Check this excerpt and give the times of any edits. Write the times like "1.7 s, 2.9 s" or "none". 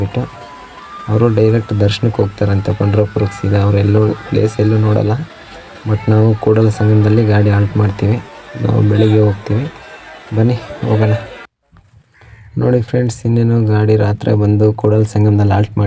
none